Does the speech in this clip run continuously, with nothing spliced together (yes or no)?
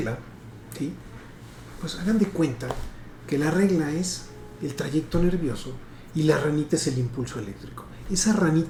yes